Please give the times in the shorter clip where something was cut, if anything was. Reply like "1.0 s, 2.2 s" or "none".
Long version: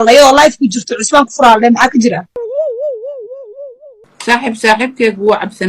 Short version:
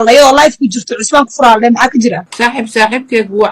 2.3 s